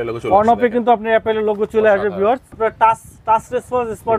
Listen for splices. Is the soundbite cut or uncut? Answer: cut